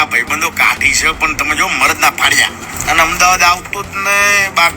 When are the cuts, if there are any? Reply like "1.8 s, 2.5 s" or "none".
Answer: 2.7 s